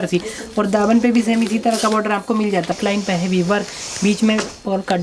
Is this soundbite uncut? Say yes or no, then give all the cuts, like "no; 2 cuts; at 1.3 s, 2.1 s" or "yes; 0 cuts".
no; 1 cut; at 2.7 s